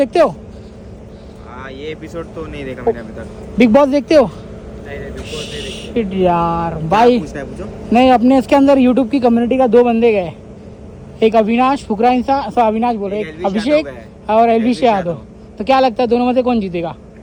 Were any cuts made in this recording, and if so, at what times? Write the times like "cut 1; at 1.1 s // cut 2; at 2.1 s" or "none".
none